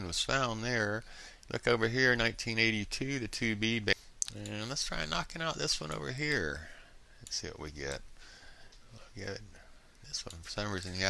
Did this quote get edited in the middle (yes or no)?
no